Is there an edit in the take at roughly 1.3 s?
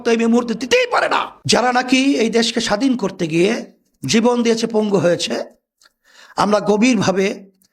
yes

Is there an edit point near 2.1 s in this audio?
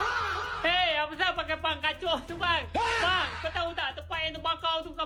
no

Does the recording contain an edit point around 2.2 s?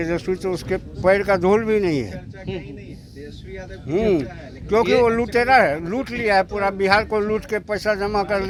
no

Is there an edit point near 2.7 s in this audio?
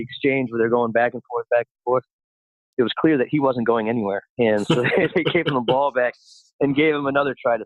yes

